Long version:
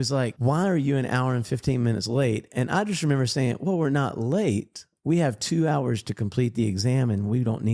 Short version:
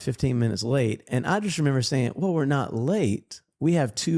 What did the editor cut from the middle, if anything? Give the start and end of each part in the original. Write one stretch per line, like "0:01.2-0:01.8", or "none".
none